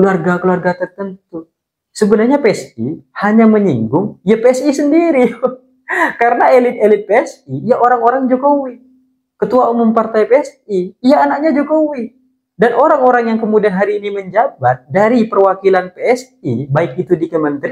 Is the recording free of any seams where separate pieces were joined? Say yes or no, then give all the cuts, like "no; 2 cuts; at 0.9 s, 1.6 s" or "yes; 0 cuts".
yes; 0 cuts